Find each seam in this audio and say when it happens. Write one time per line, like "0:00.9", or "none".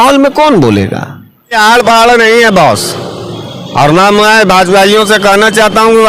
0:01.6